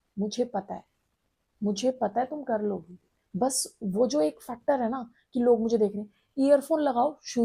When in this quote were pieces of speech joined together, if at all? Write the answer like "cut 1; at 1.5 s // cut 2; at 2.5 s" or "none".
none